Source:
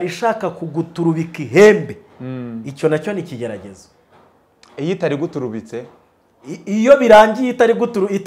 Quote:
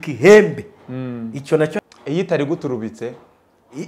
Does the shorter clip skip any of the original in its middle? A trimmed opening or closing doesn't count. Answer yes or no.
yes